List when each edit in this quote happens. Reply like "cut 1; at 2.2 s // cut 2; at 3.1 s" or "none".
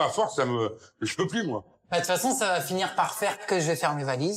cut 1; at 1.8 s // cut 2; at 3.4 s